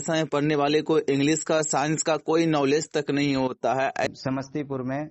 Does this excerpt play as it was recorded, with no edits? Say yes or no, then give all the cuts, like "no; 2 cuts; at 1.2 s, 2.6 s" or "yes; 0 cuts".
no; 1 cut; at 4.1 s